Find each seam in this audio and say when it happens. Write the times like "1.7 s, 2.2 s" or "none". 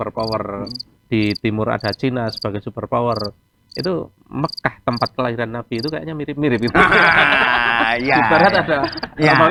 none